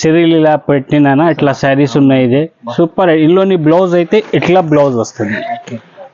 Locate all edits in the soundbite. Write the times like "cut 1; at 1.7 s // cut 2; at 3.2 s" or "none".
none